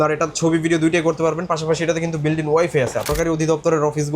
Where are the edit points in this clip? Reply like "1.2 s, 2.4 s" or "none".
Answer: 3.1 s